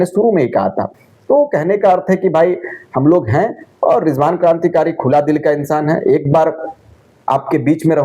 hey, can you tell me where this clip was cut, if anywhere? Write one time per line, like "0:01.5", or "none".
none